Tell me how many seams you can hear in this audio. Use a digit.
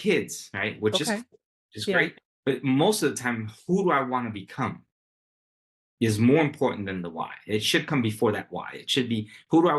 1